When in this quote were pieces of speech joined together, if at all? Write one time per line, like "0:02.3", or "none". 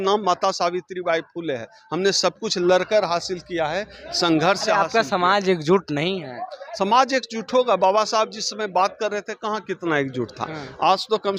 none